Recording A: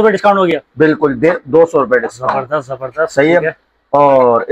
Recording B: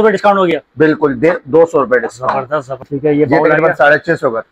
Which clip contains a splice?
B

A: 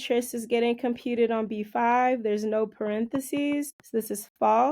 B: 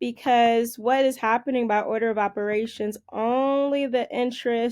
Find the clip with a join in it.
A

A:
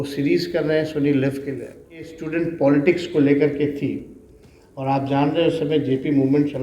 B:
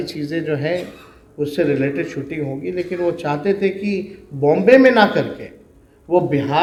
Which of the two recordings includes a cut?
A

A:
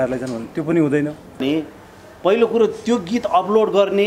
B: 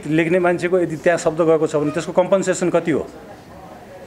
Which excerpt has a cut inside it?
A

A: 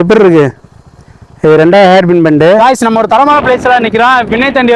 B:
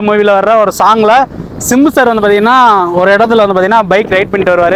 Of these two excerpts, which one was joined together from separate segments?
A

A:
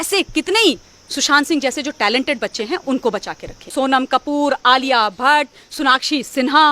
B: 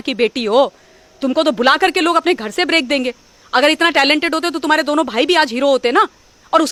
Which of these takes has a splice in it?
A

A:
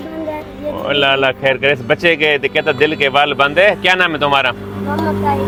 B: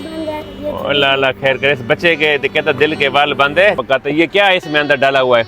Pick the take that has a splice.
B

